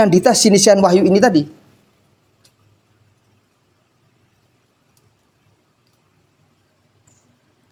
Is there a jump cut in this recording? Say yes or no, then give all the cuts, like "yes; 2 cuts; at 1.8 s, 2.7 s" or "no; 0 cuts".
no; 0 cuts